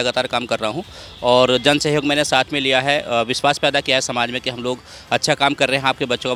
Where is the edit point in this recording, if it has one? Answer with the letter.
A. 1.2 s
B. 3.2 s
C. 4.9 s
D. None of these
D